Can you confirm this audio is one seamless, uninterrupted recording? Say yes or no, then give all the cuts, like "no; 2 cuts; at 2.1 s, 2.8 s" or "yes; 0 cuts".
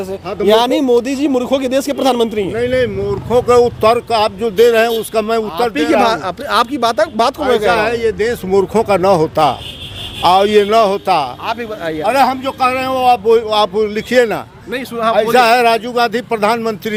yes; 0 cuts